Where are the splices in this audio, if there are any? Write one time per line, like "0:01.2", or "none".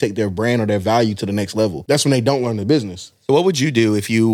0:01.8
0:03.1

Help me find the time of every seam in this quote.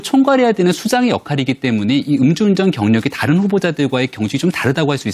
none

